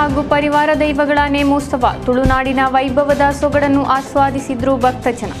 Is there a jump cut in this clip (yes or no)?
no